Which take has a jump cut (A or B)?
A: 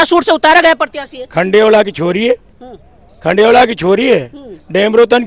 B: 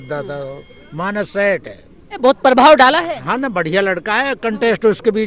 B